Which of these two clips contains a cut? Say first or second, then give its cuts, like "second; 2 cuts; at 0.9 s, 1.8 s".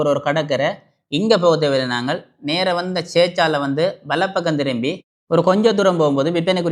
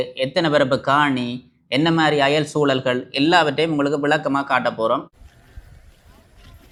first; 1 cut; at 0.9 s